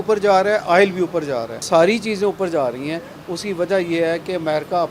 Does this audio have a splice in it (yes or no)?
yes